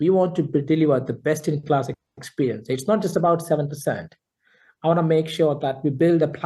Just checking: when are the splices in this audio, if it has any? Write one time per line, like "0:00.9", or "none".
none

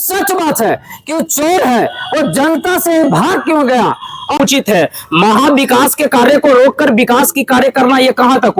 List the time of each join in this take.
0:04.4

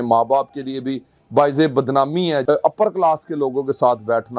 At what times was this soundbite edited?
0:02.4

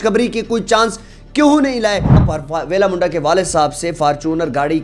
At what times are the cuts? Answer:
0:02.2

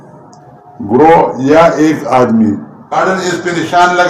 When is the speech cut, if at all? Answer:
0:02.9

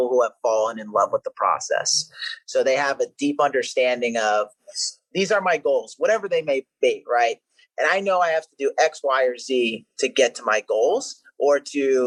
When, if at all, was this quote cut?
none

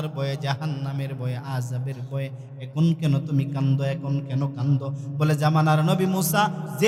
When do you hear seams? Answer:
none

